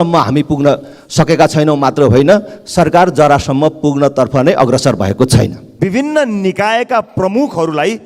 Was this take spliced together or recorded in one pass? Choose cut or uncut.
cut